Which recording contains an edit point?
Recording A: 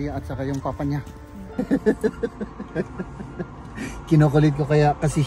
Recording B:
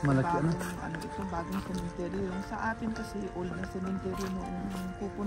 A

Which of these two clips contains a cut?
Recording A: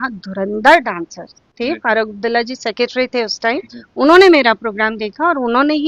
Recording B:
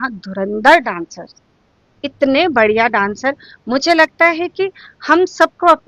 A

